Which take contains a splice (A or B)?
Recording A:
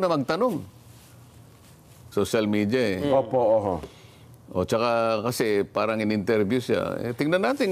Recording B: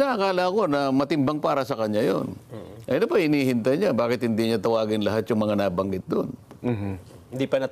A